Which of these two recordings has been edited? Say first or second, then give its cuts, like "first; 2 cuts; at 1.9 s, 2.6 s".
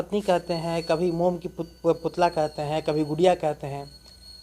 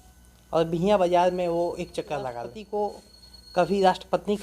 second; 1 cut; at 2.5 s